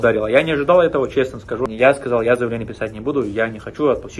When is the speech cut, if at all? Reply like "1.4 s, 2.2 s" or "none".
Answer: 1.6 s